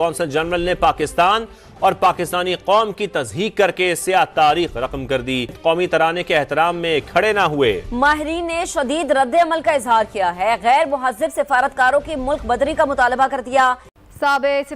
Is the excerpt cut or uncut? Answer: uncut